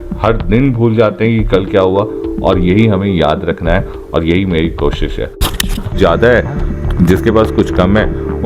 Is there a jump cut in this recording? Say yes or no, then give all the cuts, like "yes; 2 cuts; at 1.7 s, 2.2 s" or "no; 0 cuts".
yes; 1 cut; at 6.0 s